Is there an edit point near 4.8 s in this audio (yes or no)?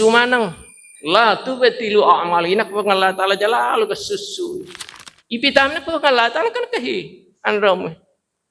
yes